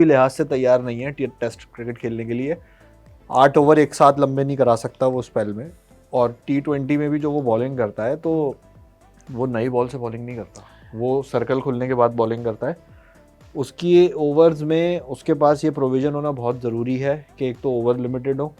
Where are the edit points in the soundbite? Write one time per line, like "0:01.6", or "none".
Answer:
none